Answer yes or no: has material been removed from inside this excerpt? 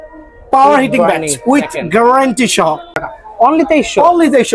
yes